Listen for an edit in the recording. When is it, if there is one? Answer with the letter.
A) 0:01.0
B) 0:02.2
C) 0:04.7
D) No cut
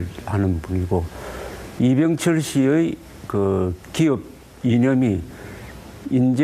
D